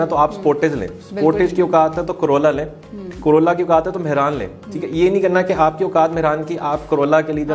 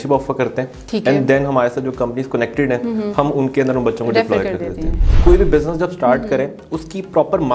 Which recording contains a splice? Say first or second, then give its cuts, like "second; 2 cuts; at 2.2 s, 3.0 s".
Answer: second; 1 cut; at 5.1 s